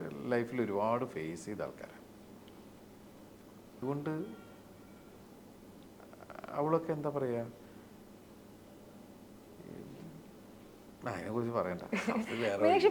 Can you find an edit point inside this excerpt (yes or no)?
yes